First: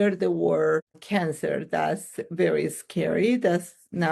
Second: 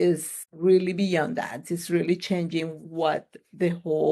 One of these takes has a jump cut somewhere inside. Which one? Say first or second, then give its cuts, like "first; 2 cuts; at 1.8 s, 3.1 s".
first; 1 cut; at 0.9 s